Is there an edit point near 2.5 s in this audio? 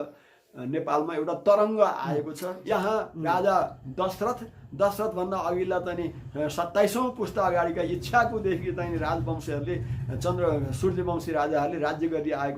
yes; 1 cut; at 2.5 s

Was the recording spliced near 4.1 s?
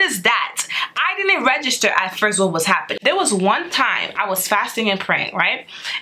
no; 1 cut; at 2.9 s

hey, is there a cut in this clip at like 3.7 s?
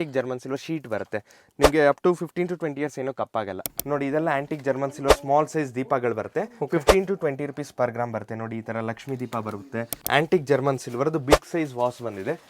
yes; 2 cuts; at 3.7 s, 10.0 s

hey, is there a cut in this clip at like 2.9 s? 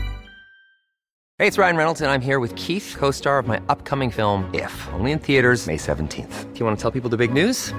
no; 1 cut; at 1.2 s

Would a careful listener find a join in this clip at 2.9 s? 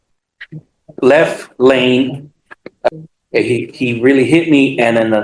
yes; 1 cut; at 2.9 s

